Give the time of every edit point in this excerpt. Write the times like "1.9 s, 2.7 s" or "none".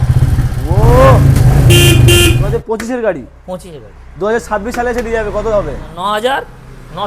2.4 s, 5.9 s